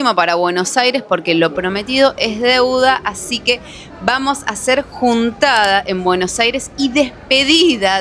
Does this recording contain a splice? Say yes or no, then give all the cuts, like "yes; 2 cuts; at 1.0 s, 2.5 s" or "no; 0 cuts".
no; 0 cuts